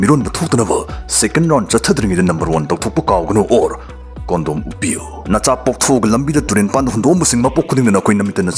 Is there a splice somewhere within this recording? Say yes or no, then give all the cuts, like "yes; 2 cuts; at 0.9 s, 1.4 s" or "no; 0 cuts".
no; 0 cuts